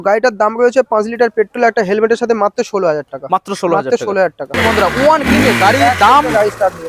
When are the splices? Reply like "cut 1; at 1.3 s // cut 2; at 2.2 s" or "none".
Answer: cut 1; at 4.6 s